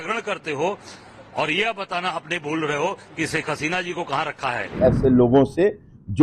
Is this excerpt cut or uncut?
cut